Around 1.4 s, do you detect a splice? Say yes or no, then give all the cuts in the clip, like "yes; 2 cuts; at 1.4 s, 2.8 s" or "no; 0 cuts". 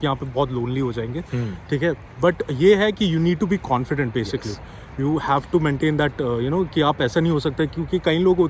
no; 0 cuts